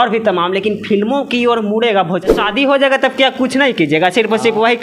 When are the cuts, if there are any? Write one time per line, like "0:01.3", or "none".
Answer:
0:02.3